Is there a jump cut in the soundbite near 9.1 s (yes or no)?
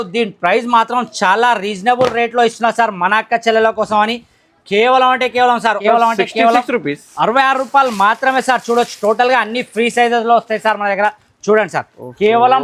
no